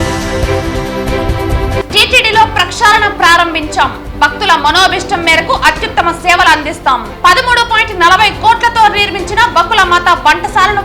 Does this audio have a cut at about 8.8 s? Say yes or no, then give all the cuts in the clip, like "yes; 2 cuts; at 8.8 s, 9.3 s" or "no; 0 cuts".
no; 1 cut; at 1.8 s